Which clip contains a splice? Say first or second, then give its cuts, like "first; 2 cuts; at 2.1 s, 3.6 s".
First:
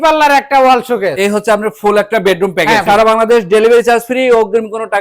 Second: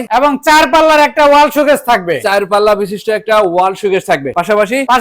first; 2 cuts; at 1.1 s, 2.8 s